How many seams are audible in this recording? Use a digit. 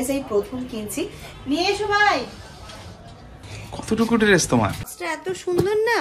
2